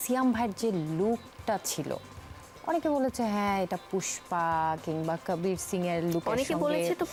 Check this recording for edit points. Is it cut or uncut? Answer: uncut